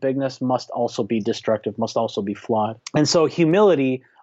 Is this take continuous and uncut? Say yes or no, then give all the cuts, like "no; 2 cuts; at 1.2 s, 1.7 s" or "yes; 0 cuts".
no; 1 cut; at 2.8 s